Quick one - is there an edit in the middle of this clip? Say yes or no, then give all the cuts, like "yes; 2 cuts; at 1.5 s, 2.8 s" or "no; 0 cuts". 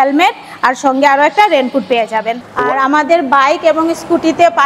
yes; 1 cut; at 2.3 s